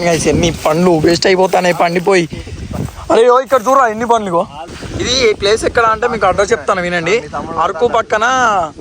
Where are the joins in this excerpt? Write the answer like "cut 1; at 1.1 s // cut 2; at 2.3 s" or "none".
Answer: cut 1; at 4.8 s